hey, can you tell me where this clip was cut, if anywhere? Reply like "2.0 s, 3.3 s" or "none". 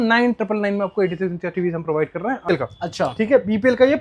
2.5 s